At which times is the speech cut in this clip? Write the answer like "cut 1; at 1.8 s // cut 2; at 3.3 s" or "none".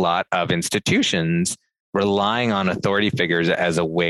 none